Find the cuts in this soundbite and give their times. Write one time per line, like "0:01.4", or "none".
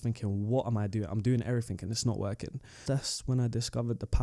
0:02.8